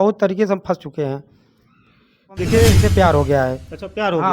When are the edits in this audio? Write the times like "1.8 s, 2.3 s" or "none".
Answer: 2.8 s